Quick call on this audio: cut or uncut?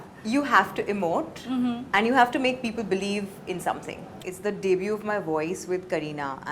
cut